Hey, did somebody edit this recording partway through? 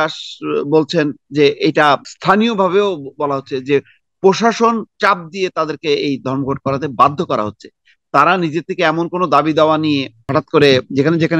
yes; 2 cuts; at 2.1 s, 10.2 s

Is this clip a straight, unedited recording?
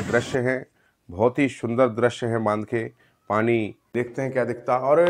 no; 1 cut; at 3.8 s

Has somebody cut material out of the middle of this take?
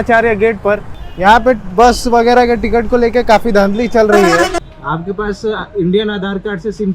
yes; 2 cuts; at 0.9 s, 4.6 s

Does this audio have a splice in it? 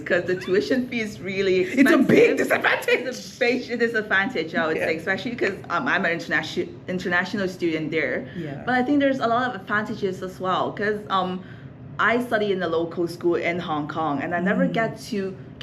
no; 0 cuts

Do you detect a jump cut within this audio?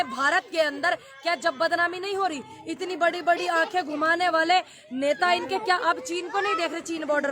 no; 0 cuts

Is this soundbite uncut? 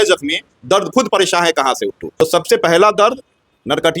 no; 1 cut; at 2.0 s

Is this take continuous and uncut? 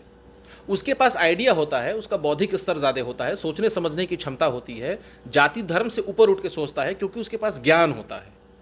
yes; 0 cuts

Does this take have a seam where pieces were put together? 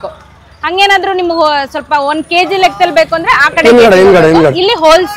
no; 0 cuts

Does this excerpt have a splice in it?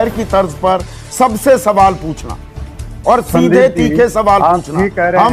no; 0 cuts

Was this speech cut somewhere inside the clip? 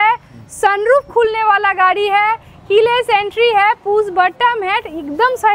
no; 0 cuts

